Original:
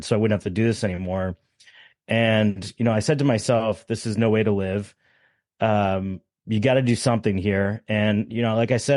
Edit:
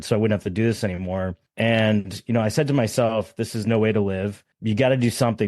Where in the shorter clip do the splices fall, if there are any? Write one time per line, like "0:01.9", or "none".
0:01.4
0:04.5

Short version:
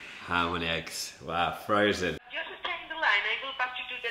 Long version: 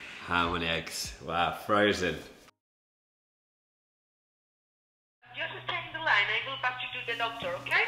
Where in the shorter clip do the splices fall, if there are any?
0:02.3

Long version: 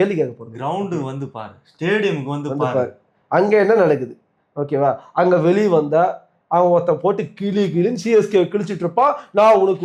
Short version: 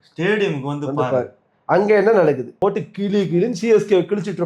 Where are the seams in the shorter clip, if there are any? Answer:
0:02.6

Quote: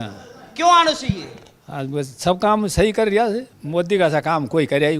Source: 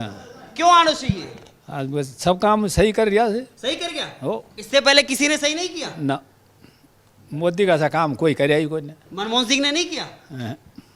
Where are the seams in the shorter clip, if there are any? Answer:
0:03.5

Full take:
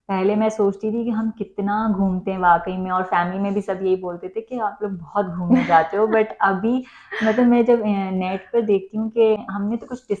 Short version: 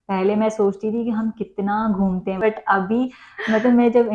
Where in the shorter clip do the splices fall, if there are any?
0:02.4

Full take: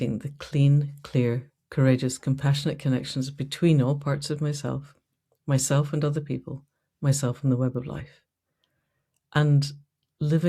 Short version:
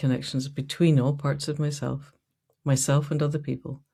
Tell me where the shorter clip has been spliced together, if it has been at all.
none

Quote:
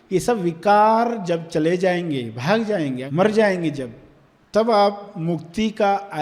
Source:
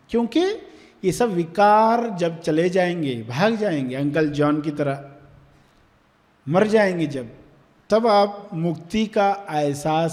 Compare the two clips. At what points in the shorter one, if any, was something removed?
0:03.0

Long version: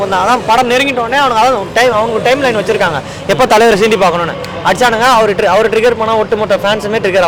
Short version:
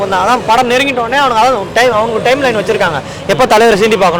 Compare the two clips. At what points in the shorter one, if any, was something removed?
none

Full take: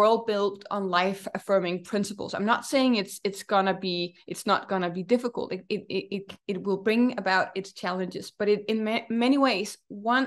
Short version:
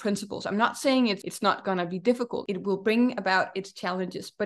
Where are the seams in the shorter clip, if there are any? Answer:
0:01.2
0:02.4

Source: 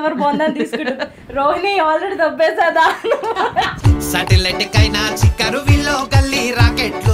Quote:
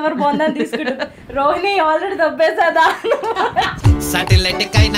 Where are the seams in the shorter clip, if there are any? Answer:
none

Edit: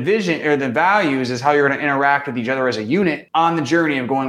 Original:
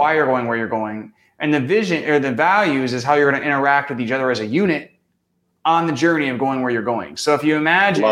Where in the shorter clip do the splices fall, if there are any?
0:03.2

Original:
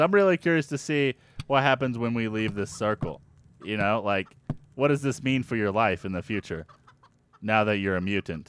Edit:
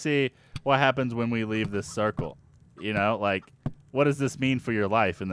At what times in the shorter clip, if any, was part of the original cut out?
none

